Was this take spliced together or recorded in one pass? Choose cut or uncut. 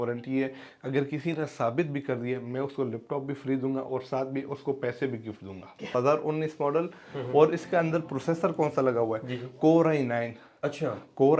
cut